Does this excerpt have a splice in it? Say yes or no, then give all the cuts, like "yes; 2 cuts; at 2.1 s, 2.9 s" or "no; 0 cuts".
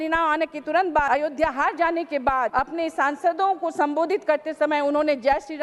yes; 2 cuts; at 1.1 s, 2.5 s